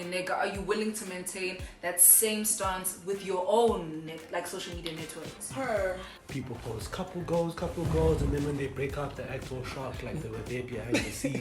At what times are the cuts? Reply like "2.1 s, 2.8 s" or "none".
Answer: 6.2 s